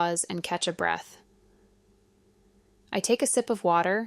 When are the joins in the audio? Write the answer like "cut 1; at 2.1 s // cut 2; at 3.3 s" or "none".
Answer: cut 1; at 1.6 s